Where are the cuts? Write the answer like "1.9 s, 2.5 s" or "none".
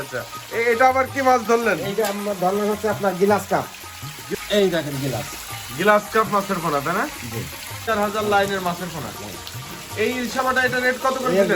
4.2 s, 7.8 s